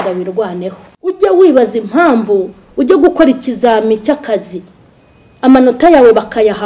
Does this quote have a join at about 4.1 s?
no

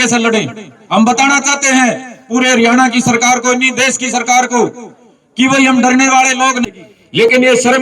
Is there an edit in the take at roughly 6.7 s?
yes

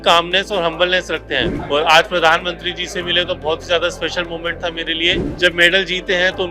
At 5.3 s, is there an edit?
yes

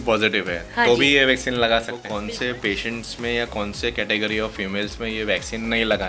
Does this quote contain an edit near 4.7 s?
no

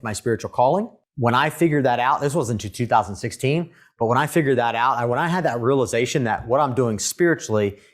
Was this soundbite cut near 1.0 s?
yes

